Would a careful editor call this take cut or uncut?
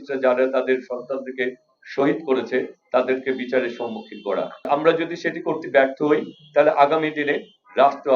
cut